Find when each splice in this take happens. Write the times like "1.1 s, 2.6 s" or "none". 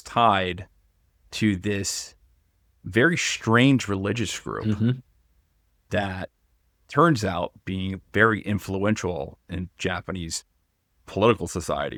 none